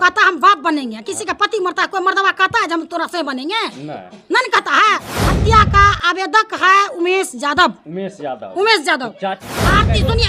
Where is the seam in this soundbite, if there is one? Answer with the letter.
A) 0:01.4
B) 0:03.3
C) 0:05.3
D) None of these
C